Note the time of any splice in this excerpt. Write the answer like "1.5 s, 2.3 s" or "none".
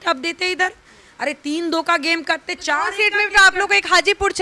none